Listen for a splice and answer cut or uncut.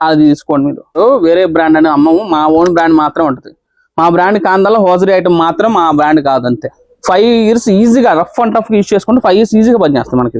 cut